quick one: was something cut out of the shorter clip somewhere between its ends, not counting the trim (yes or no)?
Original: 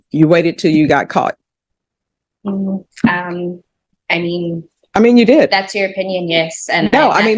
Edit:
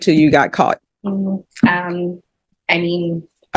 yes